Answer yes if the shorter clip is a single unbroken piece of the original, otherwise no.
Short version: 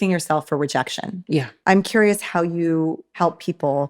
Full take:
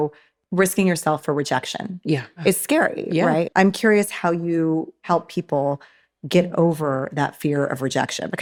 no